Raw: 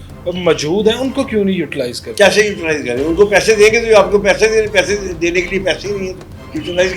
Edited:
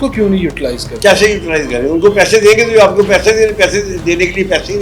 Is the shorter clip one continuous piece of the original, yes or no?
yes